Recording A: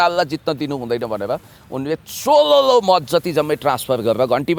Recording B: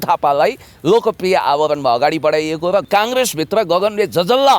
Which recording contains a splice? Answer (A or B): B